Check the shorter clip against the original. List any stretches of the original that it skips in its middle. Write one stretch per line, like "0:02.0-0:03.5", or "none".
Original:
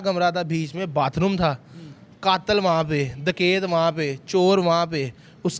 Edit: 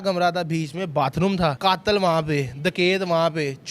0:01.6-0:02.2